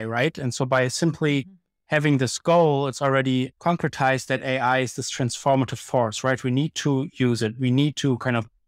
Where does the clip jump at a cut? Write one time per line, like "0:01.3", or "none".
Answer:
0:03.5